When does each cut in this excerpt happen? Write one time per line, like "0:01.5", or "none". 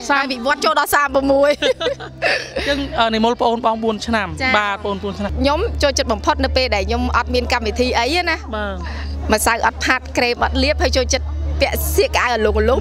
0:05.3